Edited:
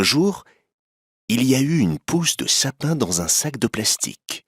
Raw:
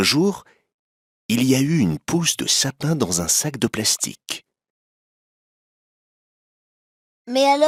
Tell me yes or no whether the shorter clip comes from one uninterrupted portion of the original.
yes